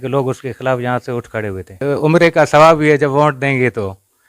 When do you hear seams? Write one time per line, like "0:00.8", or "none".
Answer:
0:01.8